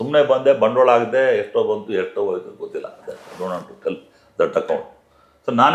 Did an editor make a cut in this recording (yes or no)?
no